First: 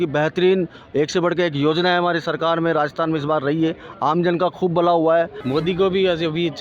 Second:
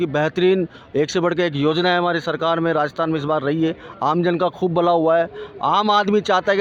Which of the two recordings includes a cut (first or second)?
first